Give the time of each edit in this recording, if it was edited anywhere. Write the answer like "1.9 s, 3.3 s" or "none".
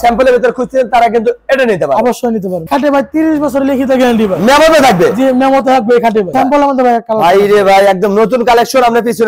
2.7 s, 6.3 s